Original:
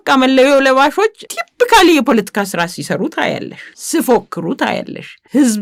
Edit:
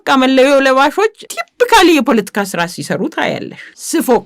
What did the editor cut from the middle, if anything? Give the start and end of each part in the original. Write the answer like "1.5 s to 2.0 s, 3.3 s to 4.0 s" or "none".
none